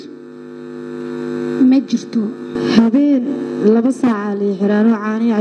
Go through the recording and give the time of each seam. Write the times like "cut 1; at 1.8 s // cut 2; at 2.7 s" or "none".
cut 1; at 2.5 s